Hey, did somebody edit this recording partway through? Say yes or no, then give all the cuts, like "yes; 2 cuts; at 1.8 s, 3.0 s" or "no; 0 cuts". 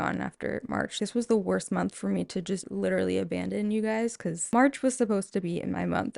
yes; 3 cuts; at 1.0 s, 2.7 s, 4.5 s